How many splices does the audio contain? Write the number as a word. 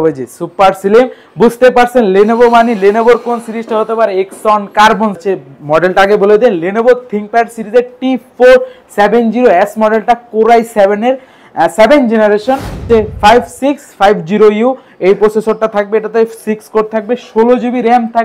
two